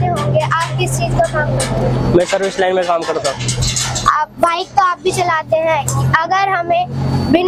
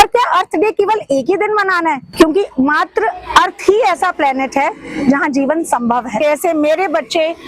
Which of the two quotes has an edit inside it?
second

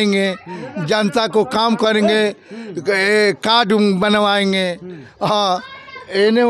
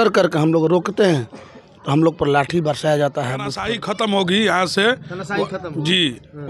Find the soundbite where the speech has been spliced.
second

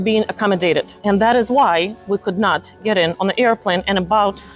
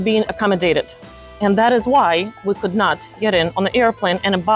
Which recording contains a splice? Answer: first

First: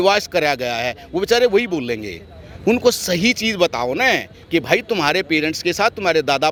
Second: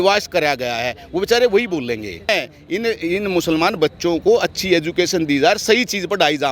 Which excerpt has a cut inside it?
second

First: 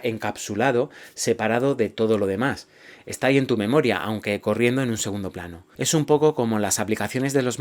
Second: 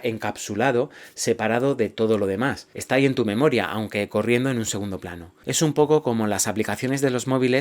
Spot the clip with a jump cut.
second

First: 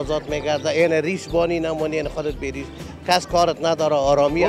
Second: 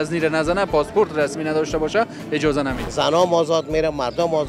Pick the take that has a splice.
second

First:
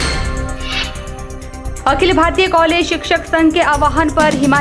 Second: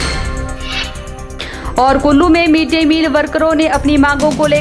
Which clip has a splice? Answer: first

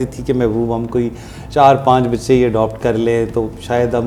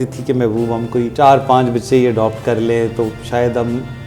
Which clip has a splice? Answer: second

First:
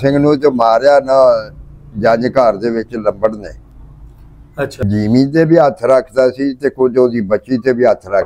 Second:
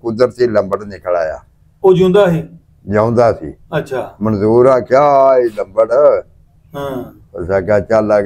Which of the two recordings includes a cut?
first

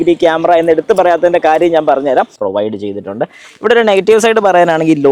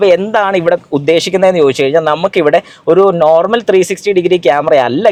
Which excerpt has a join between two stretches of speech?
first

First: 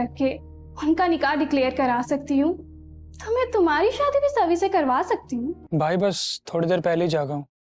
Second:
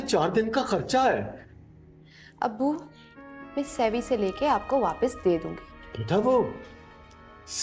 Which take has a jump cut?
first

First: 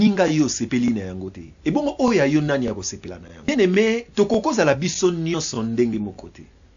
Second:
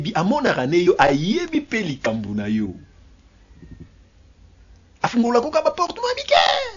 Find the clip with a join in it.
first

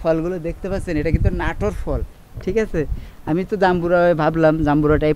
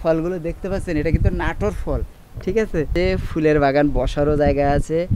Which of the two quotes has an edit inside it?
second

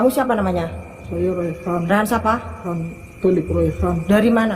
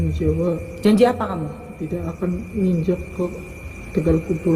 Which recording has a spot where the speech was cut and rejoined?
first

